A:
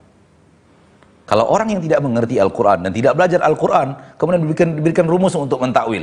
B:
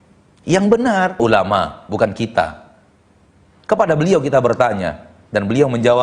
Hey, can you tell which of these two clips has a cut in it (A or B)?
B